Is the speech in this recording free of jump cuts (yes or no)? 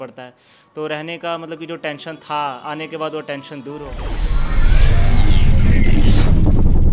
no